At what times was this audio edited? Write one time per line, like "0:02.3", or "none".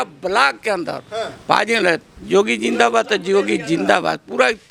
none